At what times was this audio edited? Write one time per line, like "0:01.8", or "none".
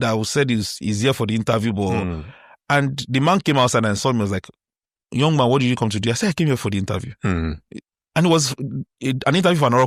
none